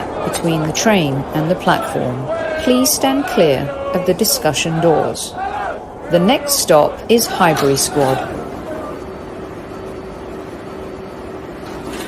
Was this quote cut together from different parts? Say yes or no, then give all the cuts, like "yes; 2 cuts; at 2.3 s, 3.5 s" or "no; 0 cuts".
no; 0 cuts